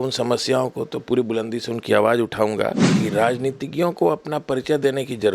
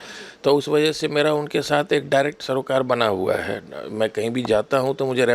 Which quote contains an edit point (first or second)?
first